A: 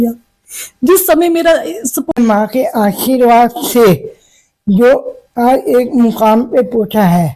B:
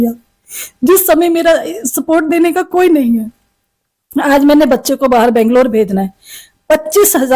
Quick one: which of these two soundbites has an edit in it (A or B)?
A